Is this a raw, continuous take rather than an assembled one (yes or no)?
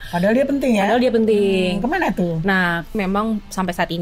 no